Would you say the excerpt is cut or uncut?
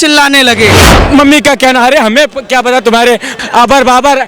cut